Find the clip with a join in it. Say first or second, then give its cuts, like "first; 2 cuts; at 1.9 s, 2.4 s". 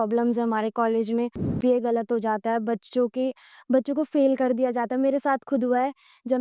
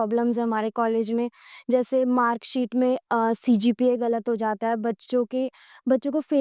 first; 1 cut; at 1.6 s